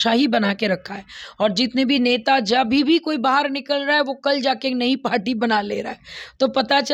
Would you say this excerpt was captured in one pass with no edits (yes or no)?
yes